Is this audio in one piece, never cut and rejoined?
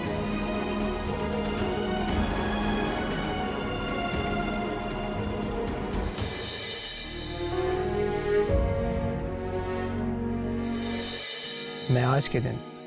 yes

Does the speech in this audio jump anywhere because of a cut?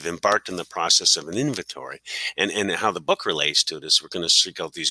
no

